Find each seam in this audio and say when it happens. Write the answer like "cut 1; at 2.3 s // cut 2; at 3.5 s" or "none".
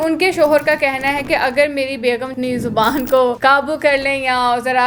cut 1; at 3.4 s